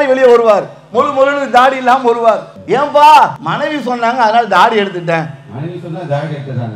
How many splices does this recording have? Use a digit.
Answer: 2